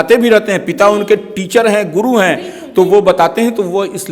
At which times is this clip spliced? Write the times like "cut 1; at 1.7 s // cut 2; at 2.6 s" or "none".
none